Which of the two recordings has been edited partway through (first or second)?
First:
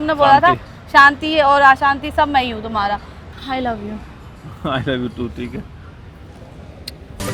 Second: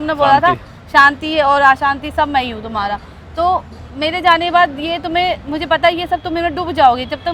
first